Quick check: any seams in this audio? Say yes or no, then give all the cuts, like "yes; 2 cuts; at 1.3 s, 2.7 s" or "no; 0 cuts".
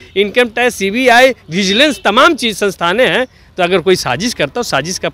no; 0 cuts